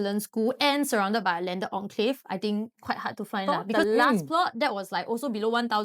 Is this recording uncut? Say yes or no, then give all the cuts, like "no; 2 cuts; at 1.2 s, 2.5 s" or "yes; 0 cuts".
no; 1 cut; at 3.5 s